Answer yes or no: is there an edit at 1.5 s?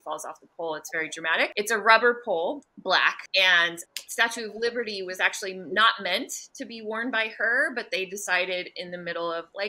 yes